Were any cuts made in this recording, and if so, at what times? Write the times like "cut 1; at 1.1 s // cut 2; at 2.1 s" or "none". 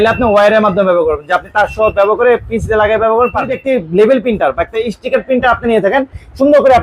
cut 1; at 3.6 s